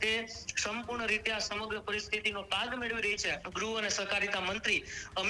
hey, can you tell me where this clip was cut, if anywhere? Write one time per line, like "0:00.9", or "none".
0:03.4